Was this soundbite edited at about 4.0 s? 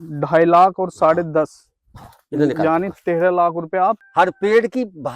yes; 1 cut; at 4.0 s

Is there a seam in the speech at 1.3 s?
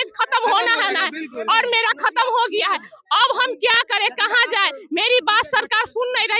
no; 0 cuts

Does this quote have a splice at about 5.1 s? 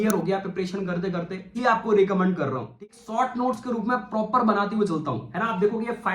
no; 2 cuts; at 1.5 s, 2.7 s

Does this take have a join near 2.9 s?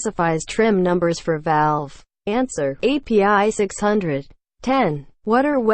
no; 1 cut; at 4.6 s

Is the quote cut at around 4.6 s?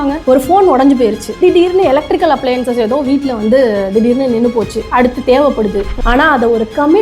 no; 1 cut; at 5.9 s

